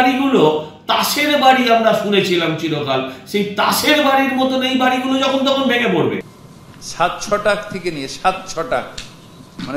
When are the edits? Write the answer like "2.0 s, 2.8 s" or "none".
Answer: 6.3 s

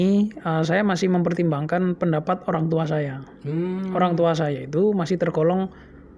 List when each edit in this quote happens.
none

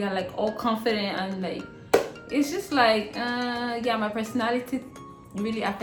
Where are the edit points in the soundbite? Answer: none

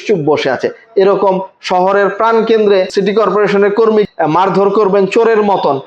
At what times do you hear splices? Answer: 2.9 s, 4.1 s

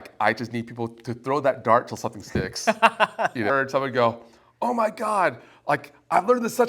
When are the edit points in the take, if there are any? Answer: 3.5 s

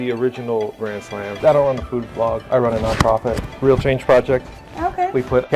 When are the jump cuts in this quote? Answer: 1.4 s

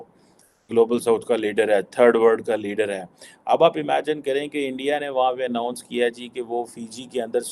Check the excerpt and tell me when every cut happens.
none

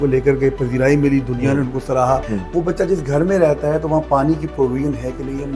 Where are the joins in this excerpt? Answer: 2.3 s

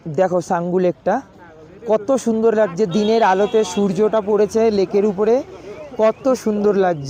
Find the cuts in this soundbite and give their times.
none

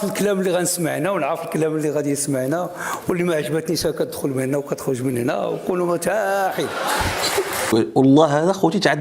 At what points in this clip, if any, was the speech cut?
7.7 s

